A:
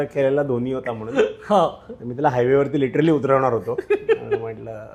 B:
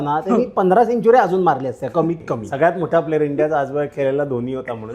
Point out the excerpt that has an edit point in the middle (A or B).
B